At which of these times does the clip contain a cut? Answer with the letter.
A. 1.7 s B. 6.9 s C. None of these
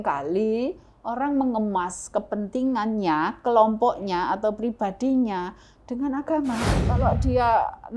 B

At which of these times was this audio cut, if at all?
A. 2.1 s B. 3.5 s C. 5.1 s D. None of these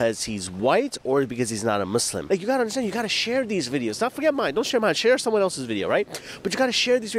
A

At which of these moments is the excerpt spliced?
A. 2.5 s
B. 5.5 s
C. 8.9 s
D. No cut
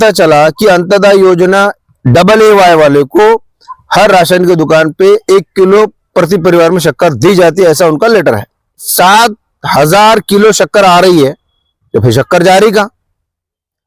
C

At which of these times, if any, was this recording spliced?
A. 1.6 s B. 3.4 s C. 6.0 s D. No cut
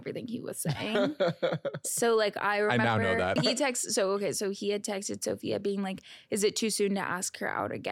B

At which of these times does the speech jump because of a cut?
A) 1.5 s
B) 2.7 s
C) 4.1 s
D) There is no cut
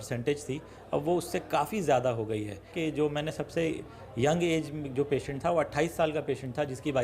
B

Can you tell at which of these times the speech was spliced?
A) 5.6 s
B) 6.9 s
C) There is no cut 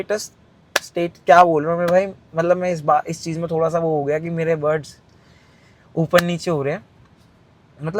C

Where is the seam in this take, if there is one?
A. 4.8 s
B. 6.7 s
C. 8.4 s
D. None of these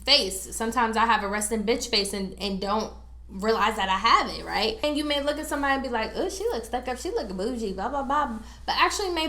A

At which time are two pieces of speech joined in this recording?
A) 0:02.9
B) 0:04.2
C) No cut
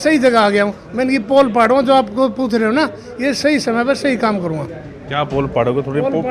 C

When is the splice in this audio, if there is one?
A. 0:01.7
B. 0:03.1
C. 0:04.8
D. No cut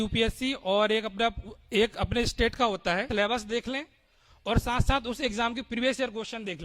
B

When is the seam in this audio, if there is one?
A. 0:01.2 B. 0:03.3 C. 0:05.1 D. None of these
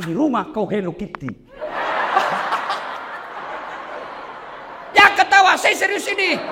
B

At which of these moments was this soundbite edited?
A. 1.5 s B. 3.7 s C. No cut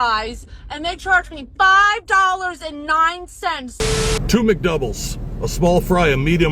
B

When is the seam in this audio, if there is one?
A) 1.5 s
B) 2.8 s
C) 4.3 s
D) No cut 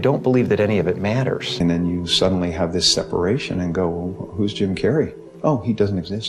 A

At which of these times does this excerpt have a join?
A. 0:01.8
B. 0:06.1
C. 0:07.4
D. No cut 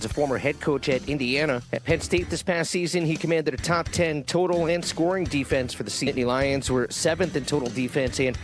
B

